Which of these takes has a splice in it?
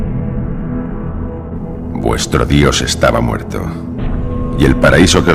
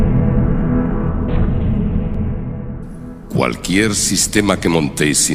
second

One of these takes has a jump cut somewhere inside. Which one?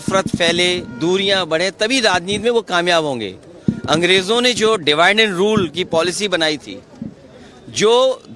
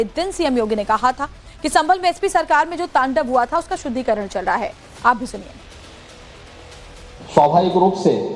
second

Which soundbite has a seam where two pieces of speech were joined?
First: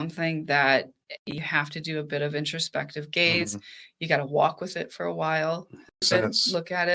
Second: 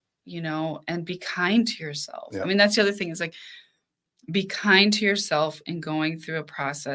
first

